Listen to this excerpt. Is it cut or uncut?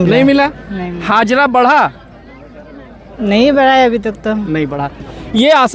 uncut